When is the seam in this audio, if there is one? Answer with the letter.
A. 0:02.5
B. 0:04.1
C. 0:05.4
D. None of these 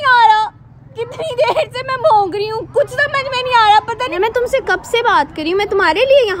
B